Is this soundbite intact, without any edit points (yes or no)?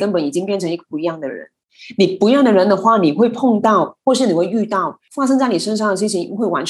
no